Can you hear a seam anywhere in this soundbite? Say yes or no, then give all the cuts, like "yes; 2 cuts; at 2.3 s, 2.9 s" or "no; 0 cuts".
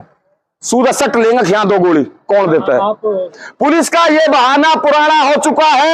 yes; 1 cut; at 3.4 s